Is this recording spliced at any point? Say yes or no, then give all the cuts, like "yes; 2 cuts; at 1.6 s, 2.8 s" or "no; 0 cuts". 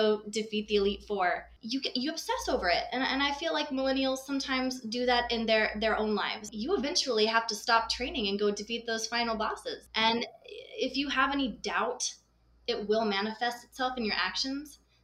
yes; 3 cuts; at 1.5 s, 6.5 s, 9.9 s